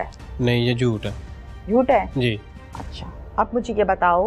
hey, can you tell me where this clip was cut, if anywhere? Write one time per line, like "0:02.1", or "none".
none